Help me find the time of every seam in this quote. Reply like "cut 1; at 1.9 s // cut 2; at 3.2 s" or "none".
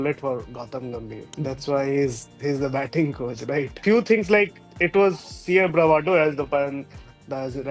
cut 1; at 1.2 s // cut 2; at 3.8 s